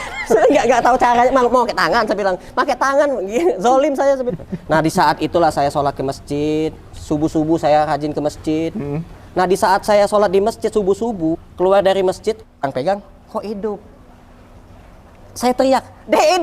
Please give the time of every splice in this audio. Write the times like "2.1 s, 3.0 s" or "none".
4.3 s, 11.5 s, 12.6 s